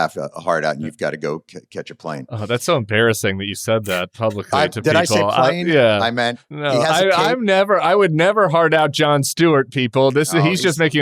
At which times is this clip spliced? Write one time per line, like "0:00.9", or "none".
none